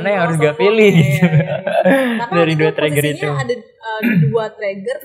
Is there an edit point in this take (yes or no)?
no